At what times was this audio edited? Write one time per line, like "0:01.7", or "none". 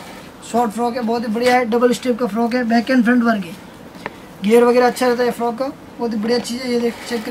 none